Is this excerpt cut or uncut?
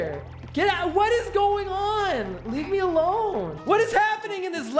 cut